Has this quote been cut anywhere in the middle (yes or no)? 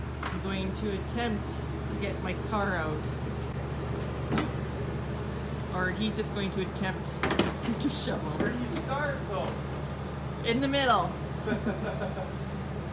no